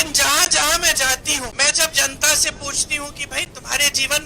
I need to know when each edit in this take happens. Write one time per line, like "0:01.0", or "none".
0:01.5